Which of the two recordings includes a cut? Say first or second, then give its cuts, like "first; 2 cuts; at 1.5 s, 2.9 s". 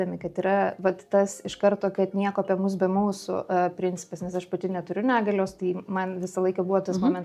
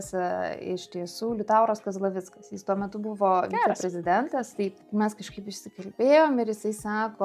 second; 1 cut; at 4.8 s